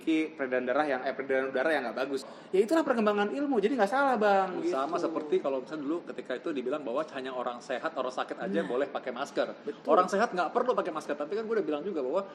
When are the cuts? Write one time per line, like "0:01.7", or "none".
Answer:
0:02.3